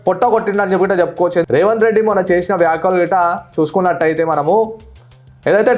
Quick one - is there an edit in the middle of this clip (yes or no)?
yes